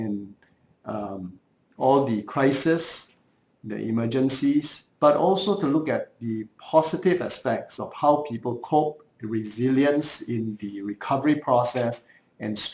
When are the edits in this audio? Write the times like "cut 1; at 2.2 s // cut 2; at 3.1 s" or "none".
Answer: cut 1; at 4.8 s